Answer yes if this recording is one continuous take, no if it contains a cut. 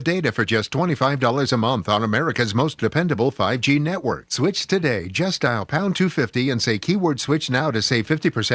yes